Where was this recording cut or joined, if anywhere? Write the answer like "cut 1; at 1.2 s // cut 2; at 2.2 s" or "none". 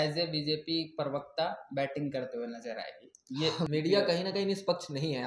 cut 1; at 3.6 s